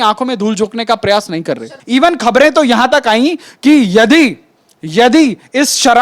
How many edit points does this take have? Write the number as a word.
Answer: one